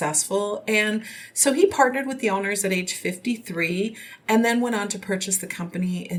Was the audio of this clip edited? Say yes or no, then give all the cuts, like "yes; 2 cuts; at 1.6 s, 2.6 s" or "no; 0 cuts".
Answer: no; 0 cuts